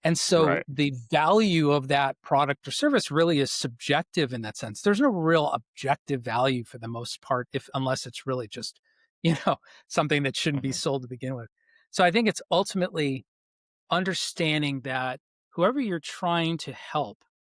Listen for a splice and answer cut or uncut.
uncut